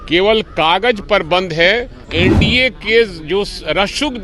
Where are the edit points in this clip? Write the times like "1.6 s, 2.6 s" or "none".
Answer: 2.0 s